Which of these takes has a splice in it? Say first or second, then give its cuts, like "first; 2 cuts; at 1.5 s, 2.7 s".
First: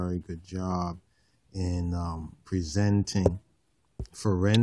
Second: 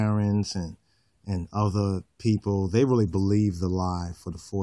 first; 1 cut; at 2.4 s